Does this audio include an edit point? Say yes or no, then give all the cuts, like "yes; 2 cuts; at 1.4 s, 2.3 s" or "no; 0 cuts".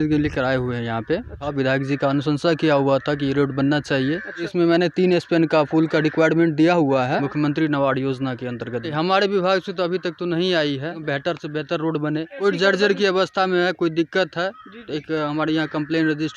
yes; 6 cuts; at 1.4 s, 4.5 s, 7.2 s, 8.9 s, 11.0 s, 12.4 s